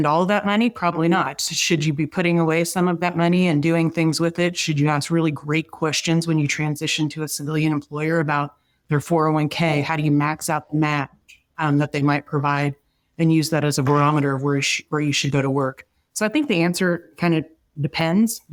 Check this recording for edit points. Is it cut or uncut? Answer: uncut